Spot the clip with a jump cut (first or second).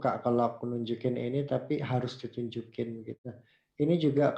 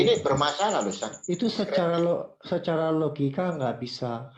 first